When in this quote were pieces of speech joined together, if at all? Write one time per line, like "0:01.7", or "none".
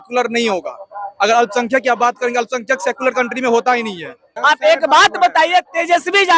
0:04.2